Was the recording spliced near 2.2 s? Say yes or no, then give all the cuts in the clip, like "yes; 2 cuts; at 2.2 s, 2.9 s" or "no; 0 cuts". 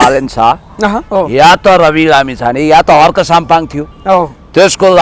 no; 0 cuts